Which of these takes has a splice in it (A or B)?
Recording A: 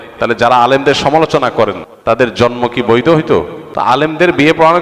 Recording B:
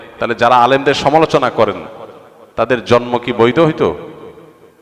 A